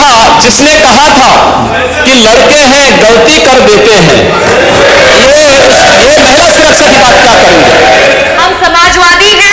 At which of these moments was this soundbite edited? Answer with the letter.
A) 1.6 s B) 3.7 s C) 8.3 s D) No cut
C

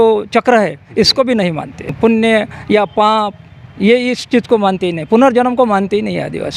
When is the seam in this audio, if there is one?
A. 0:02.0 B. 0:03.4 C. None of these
A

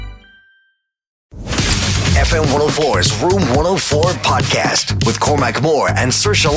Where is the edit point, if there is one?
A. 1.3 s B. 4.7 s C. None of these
A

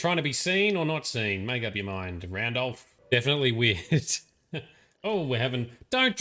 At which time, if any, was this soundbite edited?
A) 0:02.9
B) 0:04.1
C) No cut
A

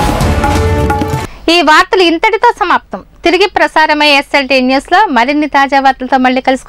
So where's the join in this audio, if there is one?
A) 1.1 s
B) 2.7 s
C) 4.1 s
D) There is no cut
D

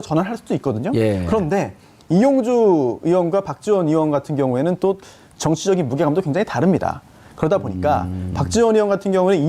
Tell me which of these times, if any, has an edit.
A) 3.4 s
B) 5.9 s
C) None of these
B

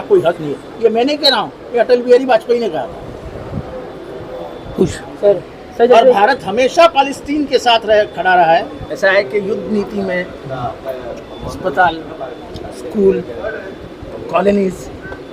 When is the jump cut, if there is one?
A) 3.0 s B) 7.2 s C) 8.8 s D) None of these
C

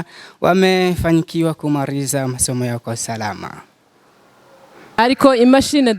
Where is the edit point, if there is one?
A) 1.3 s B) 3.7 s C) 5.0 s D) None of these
C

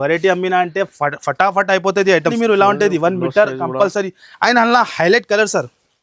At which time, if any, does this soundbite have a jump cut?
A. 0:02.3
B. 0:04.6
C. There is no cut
A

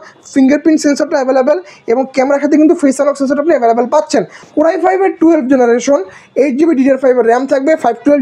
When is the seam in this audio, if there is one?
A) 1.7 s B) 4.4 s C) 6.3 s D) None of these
B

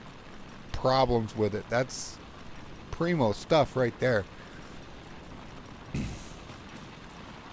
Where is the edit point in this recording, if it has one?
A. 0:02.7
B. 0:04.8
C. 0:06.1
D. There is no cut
D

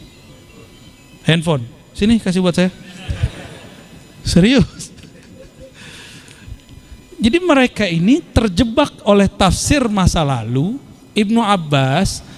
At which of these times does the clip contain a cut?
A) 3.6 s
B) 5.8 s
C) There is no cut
C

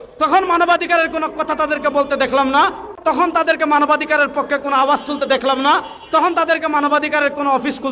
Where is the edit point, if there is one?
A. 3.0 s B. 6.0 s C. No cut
A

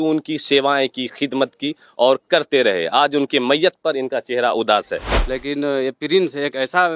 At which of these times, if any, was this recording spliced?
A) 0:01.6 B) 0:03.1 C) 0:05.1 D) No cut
C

